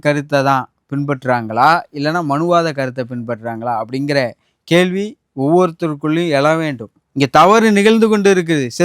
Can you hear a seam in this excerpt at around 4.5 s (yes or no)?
no